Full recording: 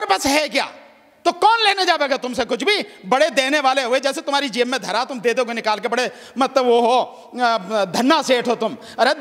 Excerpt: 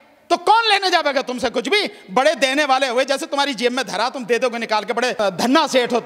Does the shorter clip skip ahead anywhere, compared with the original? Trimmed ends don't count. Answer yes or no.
yes